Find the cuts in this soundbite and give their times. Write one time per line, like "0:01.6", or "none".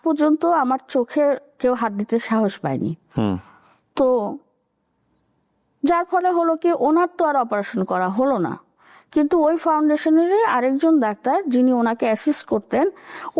none